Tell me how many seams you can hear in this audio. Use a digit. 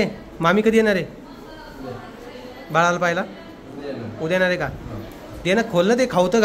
0